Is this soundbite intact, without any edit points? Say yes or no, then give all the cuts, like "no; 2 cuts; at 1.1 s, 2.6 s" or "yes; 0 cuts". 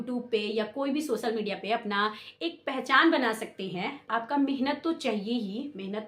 no; 1 cut; at 4.0 s